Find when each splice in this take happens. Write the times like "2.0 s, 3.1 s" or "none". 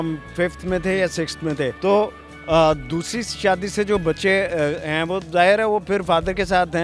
none